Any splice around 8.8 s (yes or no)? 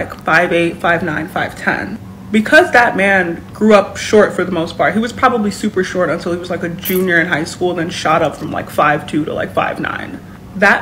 no